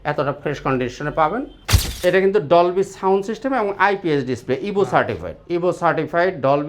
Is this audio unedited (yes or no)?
no